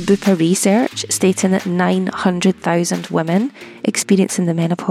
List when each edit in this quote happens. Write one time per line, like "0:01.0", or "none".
none